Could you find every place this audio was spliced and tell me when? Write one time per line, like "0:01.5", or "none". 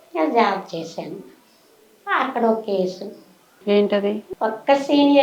0:04.3